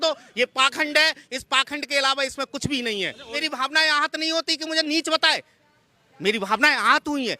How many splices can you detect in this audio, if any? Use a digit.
1